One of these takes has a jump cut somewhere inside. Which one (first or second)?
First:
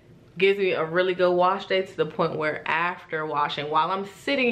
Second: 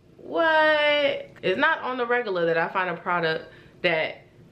second